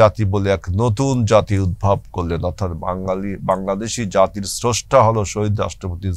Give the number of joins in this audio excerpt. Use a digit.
0